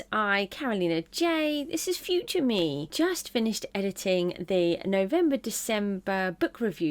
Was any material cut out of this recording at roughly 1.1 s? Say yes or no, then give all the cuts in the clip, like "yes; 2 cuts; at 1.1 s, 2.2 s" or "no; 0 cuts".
no; 1 cut; at 2.9 s